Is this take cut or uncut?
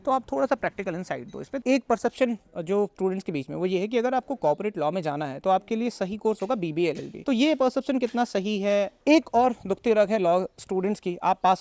cut